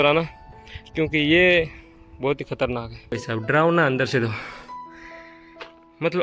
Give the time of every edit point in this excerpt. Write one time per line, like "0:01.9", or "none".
0:03.1